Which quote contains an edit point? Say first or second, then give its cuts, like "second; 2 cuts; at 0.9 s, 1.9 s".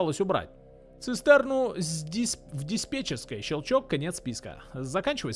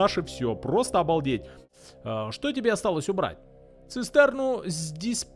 second; 1 cut; at 1.6 s